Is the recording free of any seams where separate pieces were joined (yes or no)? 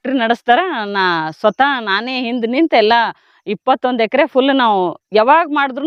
yes